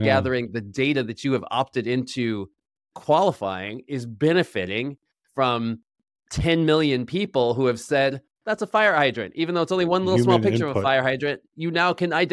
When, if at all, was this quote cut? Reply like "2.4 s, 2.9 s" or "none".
none